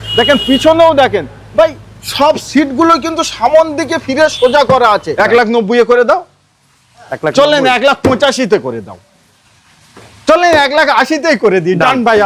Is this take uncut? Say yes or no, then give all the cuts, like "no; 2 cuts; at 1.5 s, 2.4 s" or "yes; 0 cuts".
no; 1 cut; at 5.1 s